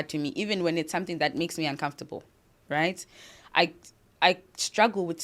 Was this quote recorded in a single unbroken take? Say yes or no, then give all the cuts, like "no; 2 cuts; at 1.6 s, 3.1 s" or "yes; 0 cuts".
yes; 0 cuts